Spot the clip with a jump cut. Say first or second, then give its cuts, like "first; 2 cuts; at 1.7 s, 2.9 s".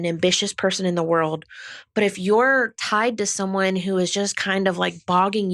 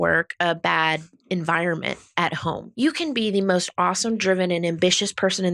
second; 1 cut; at 2.7 s